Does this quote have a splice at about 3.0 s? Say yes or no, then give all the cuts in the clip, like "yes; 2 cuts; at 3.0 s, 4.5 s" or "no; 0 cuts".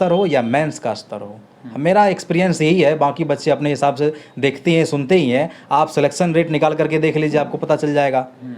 no; 0 cuts